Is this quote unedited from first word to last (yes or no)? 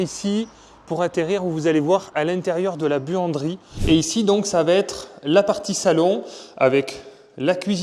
no